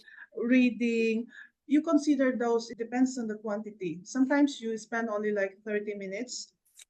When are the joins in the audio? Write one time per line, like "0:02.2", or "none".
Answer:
0:02.7